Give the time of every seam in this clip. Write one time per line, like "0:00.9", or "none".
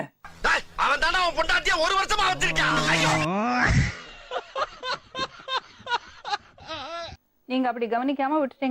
0:07.2